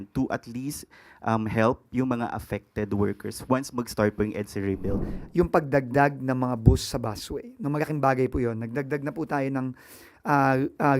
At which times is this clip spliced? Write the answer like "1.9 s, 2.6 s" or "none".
5.0 s